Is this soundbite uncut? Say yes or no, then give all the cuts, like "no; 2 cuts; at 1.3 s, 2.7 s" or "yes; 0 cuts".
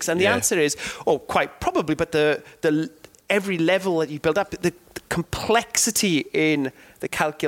yes; 0 cuts